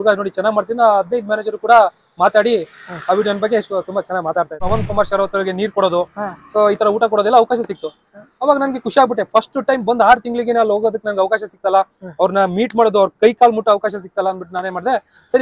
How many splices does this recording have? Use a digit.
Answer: 1